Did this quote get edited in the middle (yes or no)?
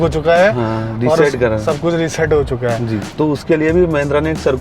yes